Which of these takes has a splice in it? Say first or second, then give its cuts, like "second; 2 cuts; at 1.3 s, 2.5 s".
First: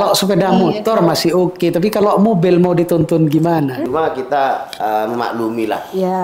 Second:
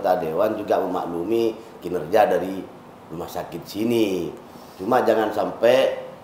first; 1 cut; at 3.8 s